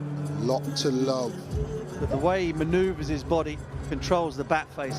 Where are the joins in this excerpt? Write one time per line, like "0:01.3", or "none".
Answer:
0:02.1